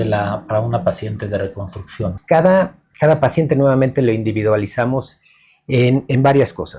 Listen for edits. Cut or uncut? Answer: cut